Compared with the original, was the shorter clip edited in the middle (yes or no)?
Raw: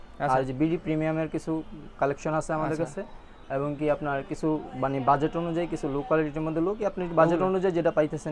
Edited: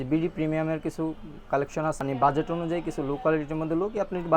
yes